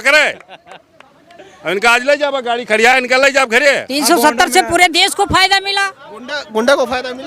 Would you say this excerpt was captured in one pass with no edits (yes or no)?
no